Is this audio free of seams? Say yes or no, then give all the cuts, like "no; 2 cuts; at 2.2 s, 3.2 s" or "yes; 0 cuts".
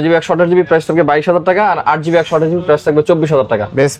yes; 0 cuts